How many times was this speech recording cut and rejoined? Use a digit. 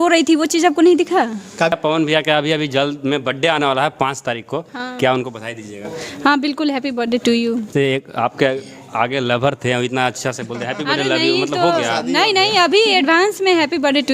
2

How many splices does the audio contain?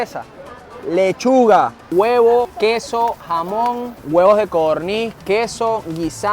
3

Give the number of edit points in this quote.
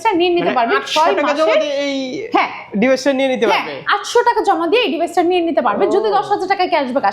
0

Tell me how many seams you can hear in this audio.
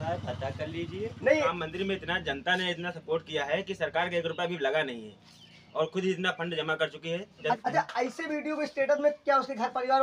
2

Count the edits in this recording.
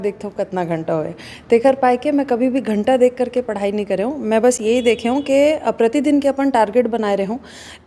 0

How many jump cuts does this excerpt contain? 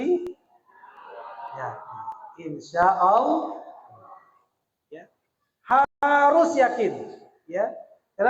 0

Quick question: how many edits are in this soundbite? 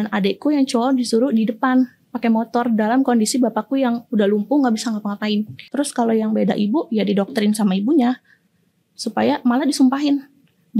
1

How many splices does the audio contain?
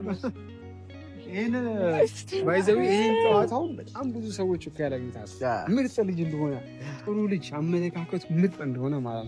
0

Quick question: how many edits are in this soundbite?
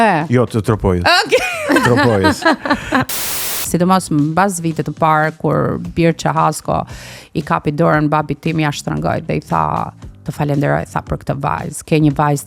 1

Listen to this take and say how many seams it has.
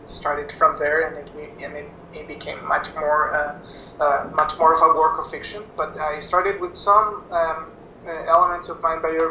1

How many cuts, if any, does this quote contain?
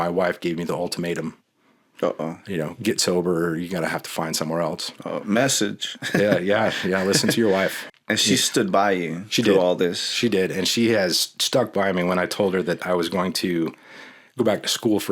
1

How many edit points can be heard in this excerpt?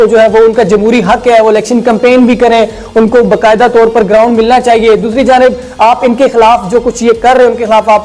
0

